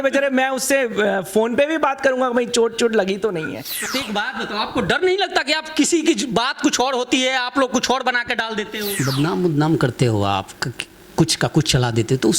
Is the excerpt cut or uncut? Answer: cut